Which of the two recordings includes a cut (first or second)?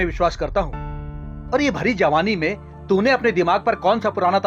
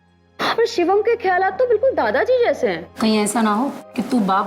second